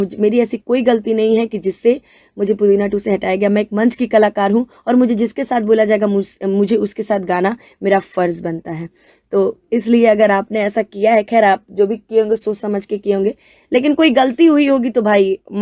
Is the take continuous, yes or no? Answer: yes